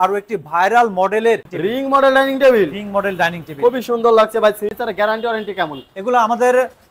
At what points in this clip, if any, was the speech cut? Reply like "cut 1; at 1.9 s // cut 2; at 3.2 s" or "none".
cut 1; at 1.4 s // cut 2; at 4.8 s